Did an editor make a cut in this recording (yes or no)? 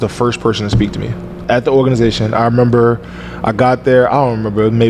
yes